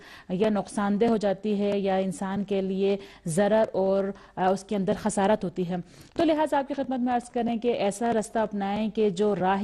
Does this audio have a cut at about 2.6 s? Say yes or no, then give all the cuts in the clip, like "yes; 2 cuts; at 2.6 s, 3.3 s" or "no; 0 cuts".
no; 1 cut; at 6.8 s